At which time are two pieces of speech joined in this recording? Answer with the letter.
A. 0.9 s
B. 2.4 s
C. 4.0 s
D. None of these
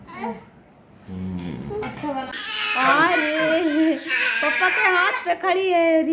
B